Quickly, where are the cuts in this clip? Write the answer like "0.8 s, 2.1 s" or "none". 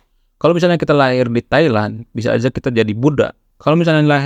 none